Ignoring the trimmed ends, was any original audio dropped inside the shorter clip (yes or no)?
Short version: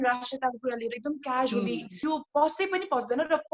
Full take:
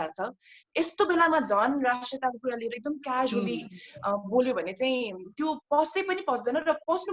yes